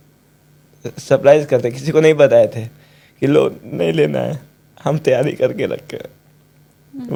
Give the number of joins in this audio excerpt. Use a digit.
0